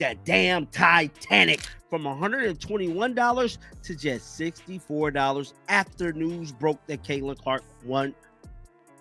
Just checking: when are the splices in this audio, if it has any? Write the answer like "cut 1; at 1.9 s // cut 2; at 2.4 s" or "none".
cut 1; at 1.6 s